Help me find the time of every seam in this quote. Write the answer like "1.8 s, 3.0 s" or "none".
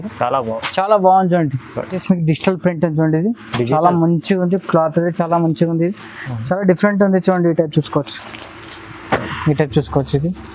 none